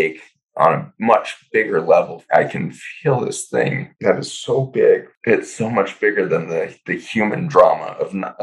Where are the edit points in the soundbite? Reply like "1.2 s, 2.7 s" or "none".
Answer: 2.2 s, 3.9 s, 5.1 s